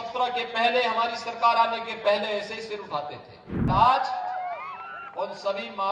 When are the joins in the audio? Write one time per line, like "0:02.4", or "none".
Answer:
0:03.7